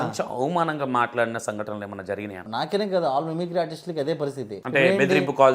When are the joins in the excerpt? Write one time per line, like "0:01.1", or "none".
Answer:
0:02.4
0:04.5